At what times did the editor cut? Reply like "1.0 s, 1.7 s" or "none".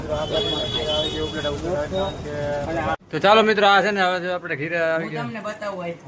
3.0 s